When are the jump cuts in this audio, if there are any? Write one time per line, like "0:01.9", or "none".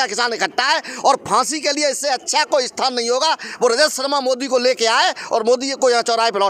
none